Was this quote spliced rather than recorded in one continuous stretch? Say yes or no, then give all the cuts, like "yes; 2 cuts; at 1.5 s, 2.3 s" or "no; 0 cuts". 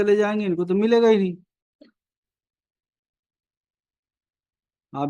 no; 0 cuts